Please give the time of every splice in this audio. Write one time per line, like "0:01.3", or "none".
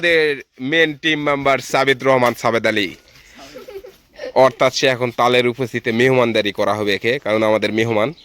none